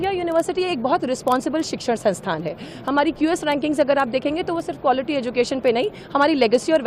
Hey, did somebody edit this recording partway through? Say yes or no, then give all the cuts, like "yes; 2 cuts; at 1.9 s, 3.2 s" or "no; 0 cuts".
no; 0 cuts